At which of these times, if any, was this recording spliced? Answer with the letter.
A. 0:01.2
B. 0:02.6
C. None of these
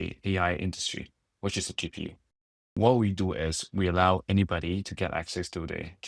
B